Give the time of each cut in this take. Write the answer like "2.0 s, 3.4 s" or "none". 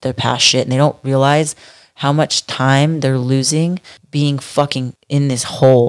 3.9 s, 5.0 s